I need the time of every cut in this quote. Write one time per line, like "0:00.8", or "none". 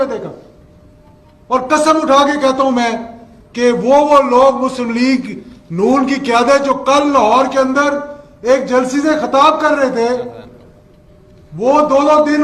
none